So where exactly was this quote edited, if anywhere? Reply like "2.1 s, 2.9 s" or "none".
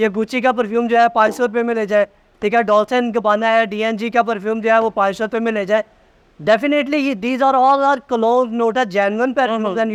none